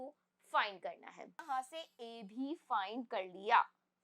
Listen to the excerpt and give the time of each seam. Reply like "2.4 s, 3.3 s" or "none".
1.5 s